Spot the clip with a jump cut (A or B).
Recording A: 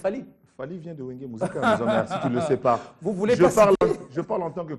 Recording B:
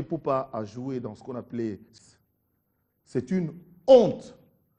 B